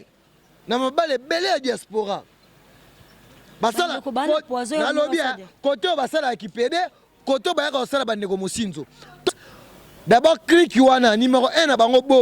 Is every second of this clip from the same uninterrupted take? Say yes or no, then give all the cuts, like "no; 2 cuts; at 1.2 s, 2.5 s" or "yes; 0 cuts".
no; 1 cut; at 9.3 s